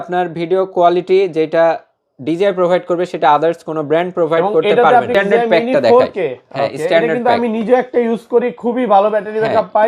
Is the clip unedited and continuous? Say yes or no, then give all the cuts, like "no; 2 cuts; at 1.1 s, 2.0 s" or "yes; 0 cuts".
no; 1 cut; at 5.1 s